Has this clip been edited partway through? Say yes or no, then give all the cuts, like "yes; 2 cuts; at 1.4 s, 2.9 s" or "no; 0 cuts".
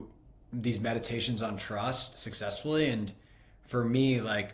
yes; 1 cut; at 2.2 s